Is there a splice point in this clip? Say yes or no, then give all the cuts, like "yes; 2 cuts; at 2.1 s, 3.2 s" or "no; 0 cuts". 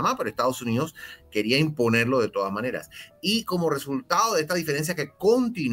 no; 0 cuts